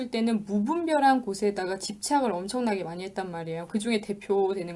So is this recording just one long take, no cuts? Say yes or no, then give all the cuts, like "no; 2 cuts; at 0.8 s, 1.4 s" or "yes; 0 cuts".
yes; 0 cuts